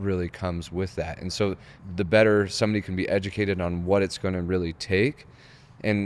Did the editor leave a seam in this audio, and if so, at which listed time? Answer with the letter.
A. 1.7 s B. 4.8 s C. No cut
A